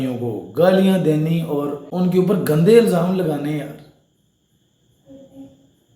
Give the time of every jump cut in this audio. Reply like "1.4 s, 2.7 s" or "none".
1.8 s